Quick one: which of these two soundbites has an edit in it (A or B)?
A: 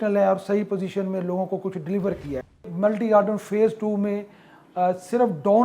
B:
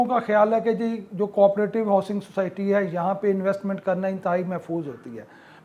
A